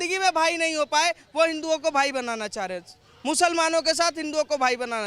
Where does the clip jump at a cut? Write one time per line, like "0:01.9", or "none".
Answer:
none